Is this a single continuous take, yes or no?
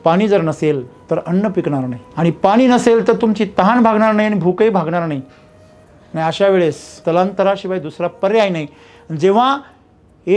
no